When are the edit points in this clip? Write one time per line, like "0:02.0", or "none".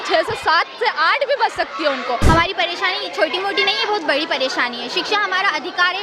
0:02.2